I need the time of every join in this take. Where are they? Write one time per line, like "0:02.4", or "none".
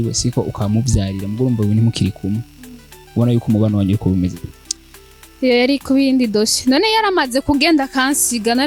none

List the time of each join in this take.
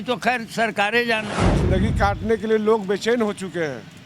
0:01.4

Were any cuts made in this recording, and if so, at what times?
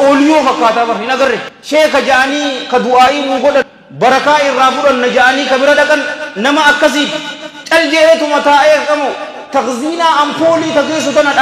0:01.5
0:03.8

